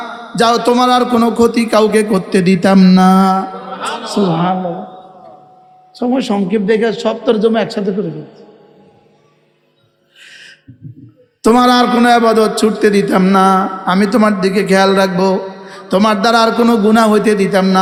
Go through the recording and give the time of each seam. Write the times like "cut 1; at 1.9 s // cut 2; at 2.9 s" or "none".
none

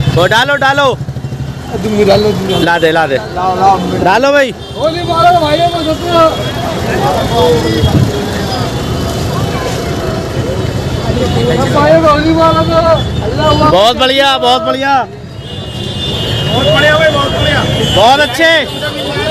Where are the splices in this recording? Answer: none

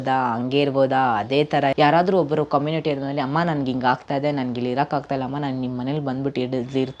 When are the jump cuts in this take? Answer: cut 1; at 1.7 s

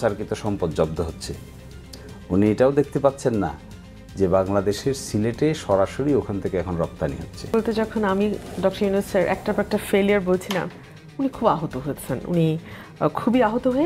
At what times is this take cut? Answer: cut 1; at 7.5 s

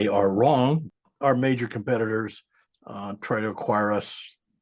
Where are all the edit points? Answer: cut 1; at 0.9 s

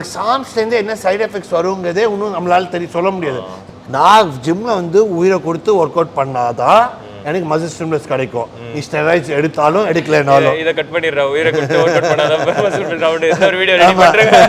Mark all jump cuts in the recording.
cut 1; at 3.5 s

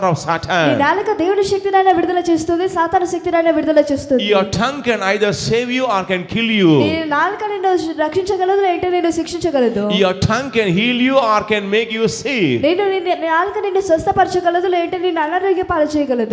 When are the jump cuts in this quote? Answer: none

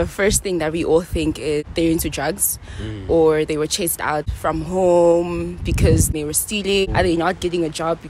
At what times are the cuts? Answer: cut 1; at 1.7 s // cut 2; at 4.3 s // cut 3; at 6.4 s

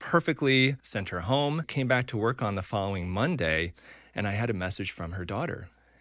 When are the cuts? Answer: cut 1; at 0.9 s // cut 2; at 1.7 s

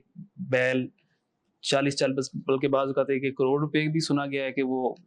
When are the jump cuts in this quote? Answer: none

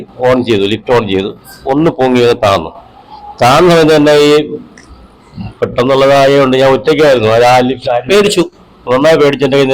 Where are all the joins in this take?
none

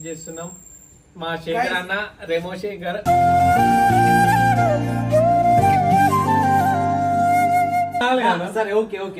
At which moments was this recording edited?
cut 1; at 8.0 s

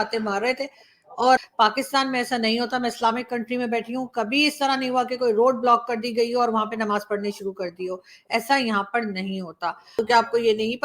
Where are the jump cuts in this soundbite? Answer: cut 1; at 1.4 s // cut 2; at 9.8 s

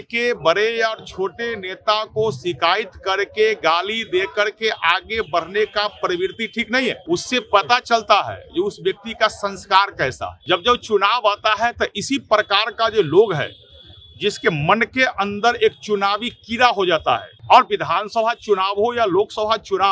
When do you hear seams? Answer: cut 1; at 7.0 s // cut 2; at 10.3 s // cut 3; at 17.3 s

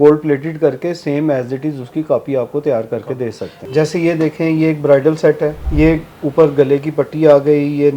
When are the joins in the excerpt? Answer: cut 1; at 3.6 s // cut 2; at 5.6 s

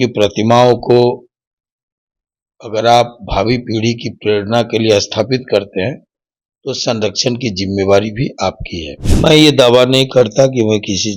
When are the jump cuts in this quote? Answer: cut 1; at 9.1 s

